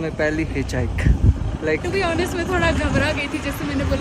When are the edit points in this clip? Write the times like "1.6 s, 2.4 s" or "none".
none